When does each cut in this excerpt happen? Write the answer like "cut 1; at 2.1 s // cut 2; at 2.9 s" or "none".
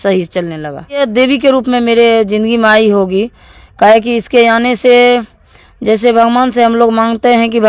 cut 1; at 1.1 s